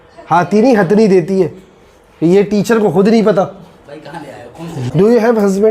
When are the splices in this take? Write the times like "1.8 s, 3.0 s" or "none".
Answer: 4.8 s